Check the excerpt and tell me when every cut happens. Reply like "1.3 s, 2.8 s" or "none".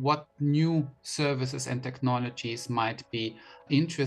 none